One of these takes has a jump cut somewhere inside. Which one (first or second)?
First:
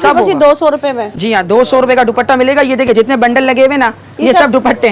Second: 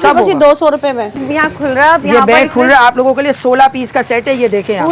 second